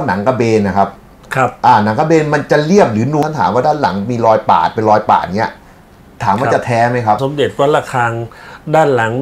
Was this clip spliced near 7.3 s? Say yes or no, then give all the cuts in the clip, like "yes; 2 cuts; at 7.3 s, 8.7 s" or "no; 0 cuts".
yes; 2 cuts; at 3.2 s, 7.3 s